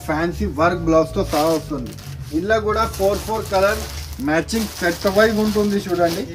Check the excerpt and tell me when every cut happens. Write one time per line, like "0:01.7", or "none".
none